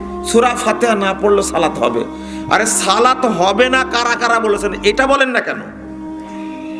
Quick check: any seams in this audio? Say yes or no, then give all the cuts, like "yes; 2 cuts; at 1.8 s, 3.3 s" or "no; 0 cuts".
no; 0 cuts